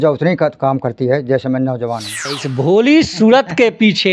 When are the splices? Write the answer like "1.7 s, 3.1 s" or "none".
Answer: 2.2 s

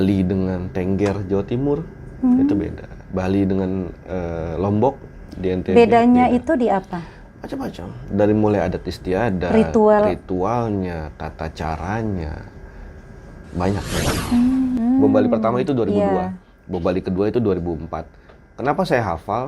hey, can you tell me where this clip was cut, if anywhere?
14.8 s

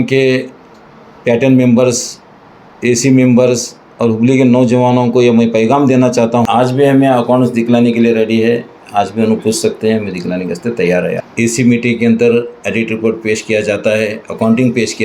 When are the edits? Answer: 6.4 s, 11.2 s

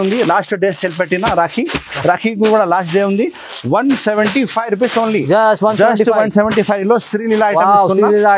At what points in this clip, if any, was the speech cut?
none

